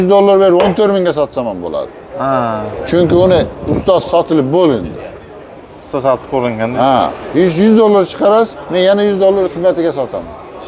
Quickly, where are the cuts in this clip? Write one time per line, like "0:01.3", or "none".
none